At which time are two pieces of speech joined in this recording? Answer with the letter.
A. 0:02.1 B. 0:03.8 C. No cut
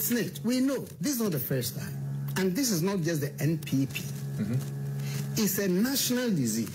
C